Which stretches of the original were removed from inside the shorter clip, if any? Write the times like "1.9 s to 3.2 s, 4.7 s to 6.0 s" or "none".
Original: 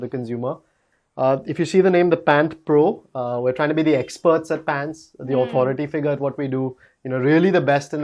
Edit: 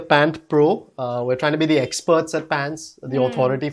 none